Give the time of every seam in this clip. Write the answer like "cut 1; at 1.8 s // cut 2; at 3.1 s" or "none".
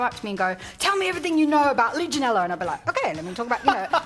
none